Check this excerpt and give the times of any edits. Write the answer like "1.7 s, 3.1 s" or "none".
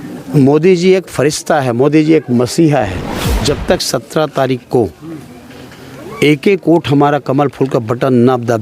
3.4 s